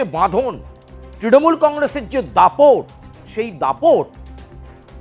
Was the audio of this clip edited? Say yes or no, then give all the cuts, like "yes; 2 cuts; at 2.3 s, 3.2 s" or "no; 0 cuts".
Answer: yes; 1 cut; at 4.1 s